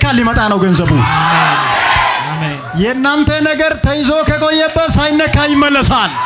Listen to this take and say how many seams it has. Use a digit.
1